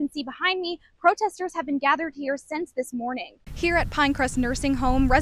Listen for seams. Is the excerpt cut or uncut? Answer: cut